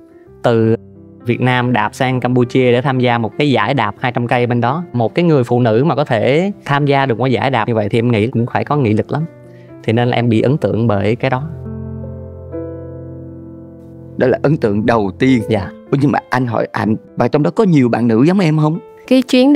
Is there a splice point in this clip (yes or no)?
no